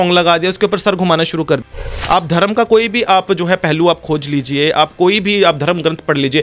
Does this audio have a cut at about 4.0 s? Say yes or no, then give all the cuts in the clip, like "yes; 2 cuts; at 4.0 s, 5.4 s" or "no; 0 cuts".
no; 1 cut; at 1.6 s